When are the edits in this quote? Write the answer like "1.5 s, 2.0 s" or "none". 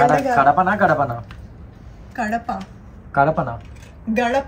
none

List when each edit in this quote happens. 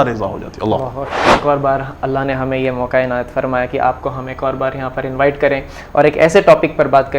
1.3 s

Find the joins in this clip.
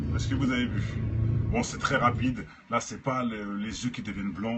none

